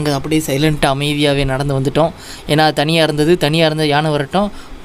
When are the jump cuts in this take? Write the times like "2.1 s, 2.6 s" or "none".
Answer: none